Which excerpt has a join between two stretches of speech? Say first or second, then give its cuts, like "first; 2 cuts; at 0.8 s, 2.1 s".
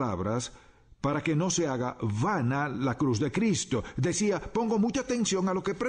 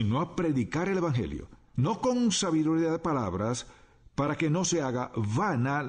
second; 1 cut; at 1.1 s